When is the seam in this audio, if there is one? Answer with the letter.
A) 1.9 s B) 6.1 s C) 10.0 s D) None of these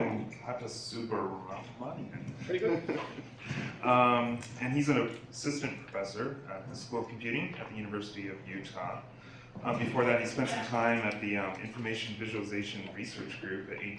D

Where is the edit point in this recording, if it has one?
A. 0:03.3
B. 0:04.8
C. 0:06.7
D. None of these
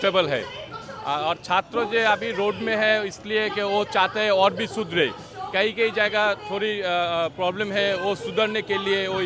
D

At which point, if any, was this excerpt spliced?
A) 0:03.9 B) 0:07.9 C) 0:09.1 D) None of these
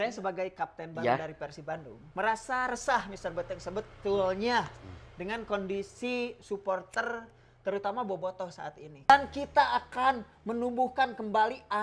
C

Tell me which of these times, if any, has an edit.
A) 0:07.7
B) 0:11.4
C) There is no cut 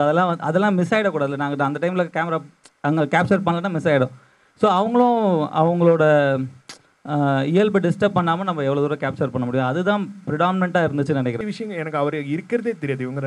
B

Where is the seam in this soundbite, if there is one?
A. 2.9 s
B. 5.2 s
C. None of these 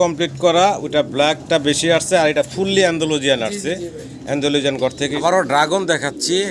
B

